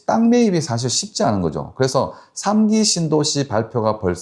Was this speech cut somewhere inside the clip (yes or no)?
no